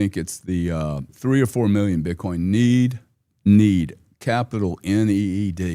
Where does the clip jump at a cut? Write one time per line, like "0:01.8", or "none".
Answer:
0:01.1